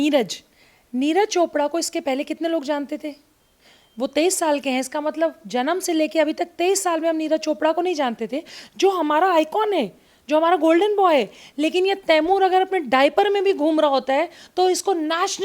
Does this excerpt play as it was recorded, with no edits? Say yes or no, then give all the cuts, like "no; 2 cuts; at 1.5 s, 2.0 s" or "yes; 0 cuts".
yes; 0 cuts